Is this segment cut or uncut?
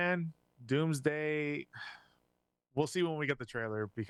uncut